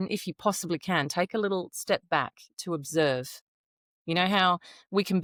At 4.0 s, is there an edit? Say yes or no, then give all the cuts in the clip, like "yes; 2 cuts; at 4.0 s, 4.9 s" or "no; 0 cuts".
no; 0 cuts